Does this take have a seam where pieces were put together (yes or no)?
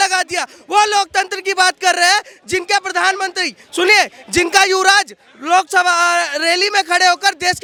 no